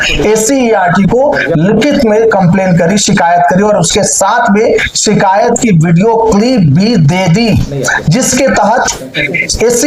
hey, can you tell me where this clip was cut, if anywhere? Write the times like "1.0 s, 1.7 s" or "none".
none